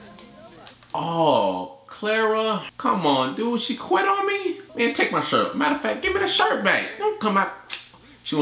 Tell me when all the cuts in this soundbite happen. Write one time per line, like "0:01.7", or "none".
0:02.7
0:04.6

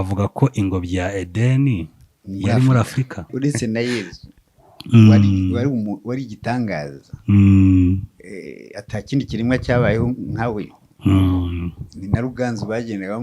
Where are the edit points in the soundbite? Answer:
0:03.3

